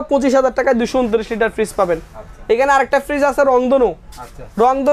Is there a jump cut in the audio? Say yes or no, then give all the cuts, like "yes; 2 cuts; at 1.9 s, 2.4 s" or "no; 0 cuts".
no; 0 cuts